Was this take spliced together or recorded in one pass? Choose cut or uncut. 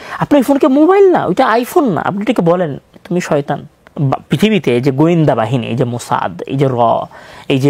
cut